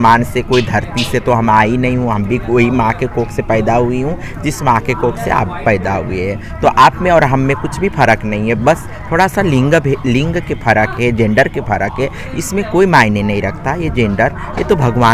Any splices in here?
no; 0 cuts

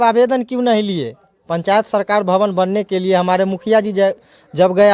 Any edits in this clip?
no; 0 cuts

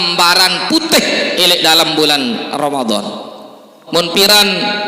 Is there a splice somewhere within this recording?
yes; 1 cut; at 3.7 s

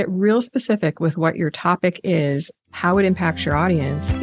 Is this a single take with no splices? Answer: yes; 0 cuts

